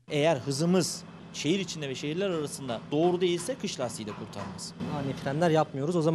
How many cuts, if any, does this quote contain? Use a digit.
2